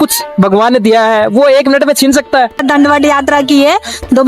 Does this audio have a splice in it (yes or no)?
yes